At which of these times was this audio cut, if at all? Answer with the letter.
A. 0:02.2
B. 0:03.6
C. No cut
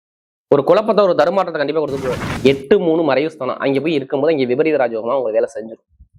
A